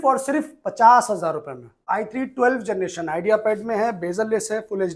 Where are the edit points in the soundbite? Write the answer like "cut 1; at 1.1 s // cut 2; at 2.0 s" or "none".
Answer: cut 1; at 1.8 s